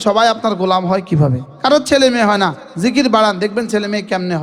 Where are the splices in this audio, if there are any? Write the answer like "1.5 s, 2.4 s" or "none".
1.4 s